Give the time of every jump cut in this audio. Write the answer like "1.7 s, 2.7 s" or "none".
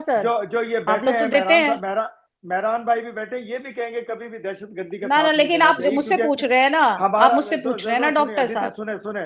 none